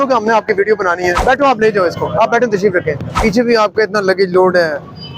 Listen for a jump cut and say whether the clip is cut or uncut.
cut